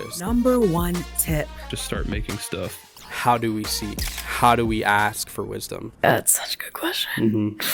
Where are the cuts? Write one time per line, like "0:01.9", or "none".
none